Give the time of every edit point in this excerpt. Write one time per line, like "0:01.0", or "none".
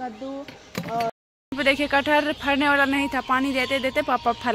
0:01.1